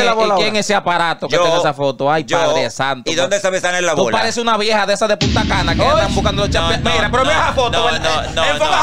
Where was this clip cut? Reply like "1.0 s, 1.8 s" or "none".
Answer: none